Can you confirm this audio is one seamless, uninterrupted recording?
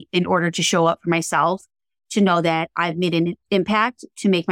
no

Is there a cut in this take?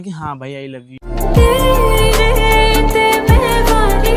no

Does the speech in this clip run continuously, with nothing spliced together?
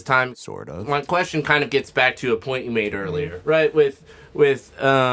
yes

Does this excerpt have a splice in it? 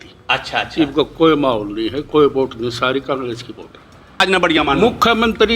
yes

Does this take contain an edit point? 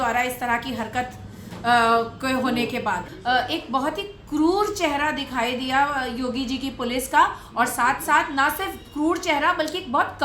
yes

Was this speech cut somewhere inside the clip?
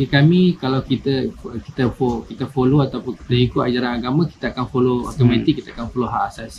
no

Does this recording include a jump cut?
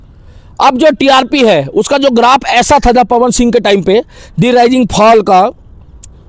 no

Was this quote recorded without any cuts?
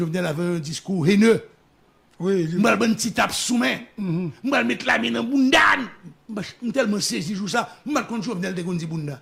yes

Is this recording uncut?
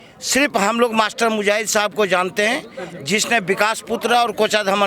yes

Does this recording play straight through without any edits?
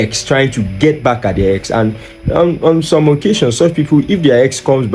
yes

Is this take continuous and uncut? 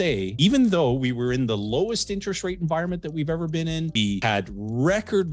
yes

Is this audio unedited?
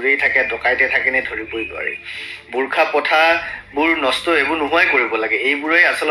yes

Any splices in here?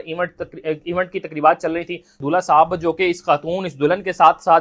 yes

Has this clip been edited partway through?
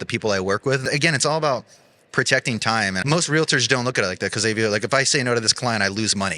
yes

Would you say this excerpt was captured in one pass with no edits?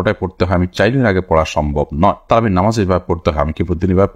yes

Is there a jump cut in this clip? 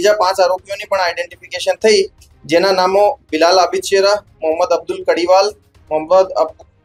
no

